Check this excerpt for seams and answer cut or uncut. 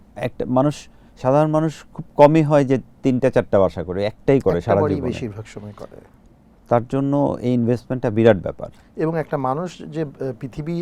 uncut